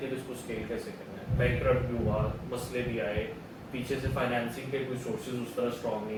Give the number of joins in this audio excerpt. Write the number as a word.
zero